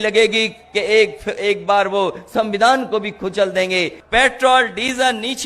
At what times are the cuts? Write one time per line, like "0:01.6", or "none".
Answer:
0:04.0